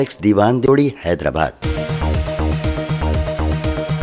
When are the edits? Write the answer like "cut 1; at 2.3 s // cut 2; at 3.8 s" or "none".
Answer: cut 1; at 1.6 s